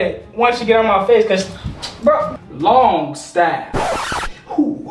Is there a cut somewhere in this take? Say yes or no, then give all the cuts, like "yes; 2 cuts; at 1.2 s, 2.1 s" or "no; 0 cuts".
yes; 1 cut; at 2.3 s